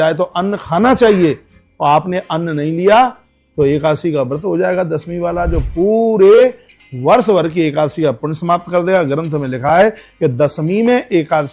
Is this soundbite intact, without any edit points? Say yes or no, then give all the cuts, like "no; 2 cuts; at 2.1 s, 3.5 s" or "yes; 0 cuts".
yes; 0 cuts